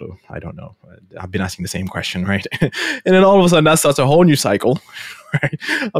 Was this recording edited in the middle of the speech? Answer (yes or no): no